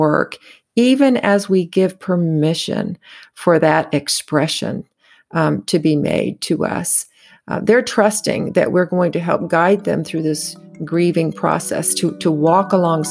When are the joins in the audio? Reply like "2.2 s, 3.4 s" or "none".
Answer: none